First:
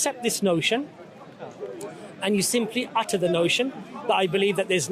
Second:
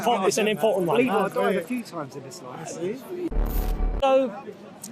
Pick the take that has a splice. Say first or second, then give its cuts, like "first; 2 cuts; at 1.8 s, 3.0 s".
second; 1 cut; at 3.4 s